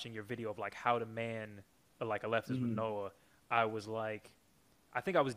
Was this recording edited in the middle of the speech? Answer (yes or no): no